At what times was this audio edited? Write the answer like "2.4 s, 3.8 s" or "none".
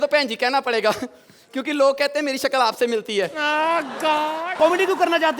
4.4 s